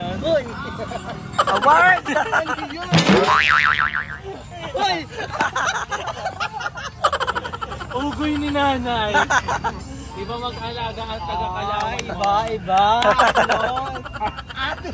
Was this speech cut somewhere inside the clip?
no; 0 cuts

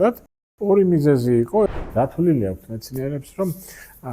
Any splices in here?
yes; 1 cut; at 1.7 s

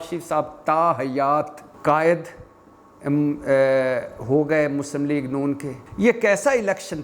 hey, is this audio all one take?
no; 2 cuts; at 1.6 s, 5.8 s

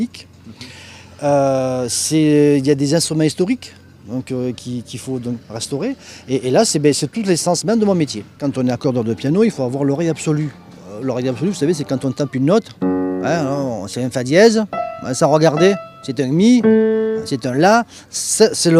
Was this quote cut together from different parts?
yes; 1 cut; at 9.0 s

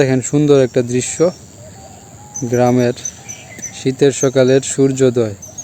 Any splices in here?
no; 0 cuts

